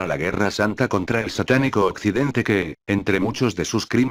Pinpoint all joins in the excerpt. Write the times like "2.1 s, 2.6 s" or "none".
none